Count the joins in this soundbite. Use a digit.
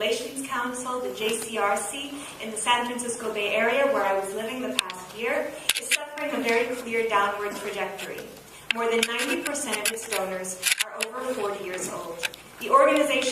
1